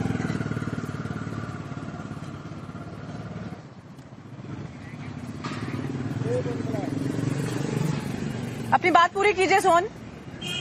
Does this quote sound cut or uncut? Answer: uncut